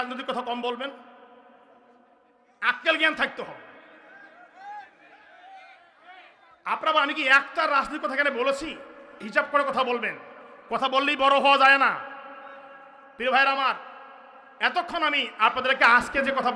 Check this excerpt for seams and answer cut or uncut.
uncut